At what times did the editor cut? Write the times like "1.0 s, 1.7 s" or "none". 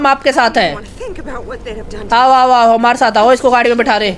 none